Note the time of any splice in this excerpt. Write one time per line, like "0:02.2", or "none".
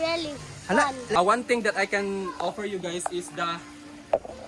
0:01.1

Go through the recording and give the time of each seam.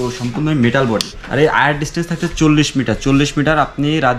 0:01.2

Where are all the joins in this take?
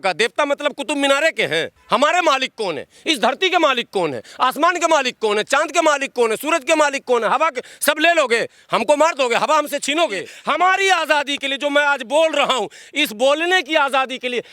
0:01.8
0:10.3

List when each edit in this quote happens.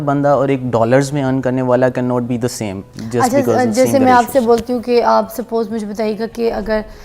none

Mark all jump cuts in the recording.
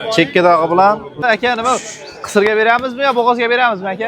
0:01.2

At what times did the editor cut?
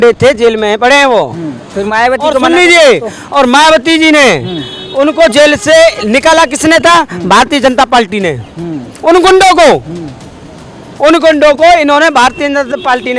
none

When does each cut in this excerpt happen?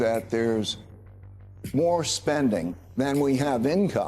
0:02.8

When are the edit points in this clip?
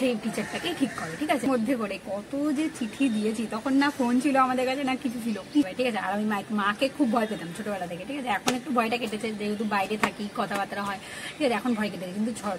0:01.5
0:05.7

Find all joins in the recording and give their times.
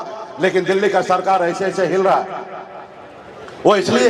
none

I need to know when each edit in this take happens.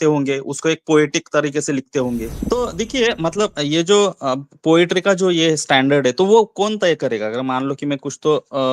0:02.3

